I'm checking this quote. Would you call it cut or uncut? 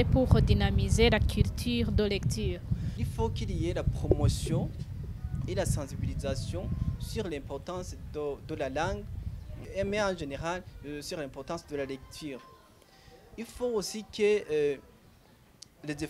cut